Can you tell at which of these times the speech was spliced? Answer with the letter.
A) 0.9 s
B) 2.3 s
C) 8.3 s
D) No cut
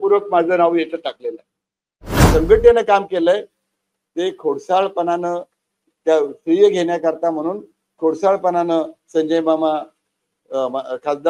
B